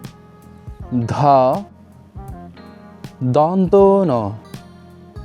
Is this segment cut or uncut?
uncut